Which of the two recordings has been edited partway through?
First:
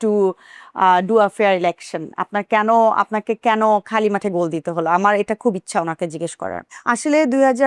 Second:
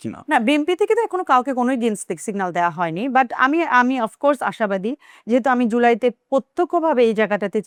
first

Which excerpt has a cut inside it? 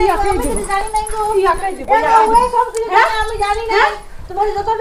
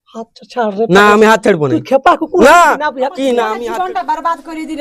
second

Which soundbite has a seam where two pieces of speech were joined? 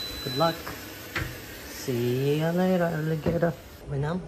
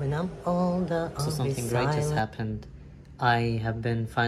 second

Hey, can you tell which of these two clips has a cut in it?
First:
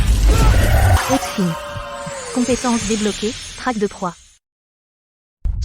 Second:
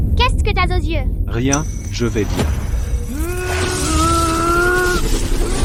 first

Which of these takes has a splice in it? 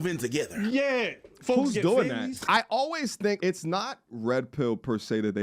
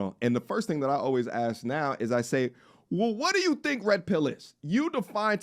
first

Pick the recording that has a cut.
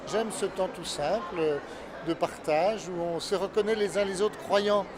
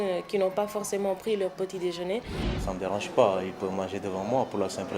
second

